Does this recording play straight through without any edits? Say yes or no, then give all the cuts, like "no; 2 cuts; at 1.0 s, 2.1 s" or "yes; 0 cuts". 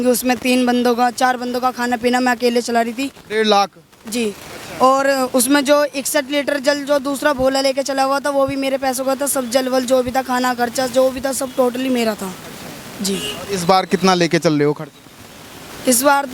yes; 0 cuts